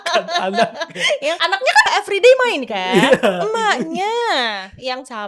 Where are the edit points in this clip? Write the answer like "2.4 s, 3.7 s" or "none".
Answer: 1.9 s